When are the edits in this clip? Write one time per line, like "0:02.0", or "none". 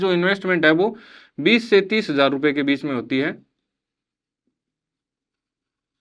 none